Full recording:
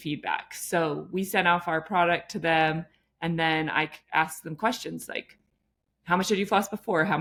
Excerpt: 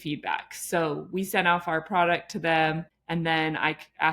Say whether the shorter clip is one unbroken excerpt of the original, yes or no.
no